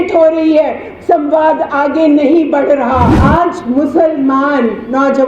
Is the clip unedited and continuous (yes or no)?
no